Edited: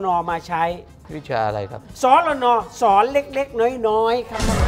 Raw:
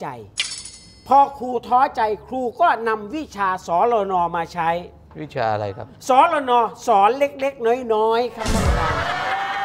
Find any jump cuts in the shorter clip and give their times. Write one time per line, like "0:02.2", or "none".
none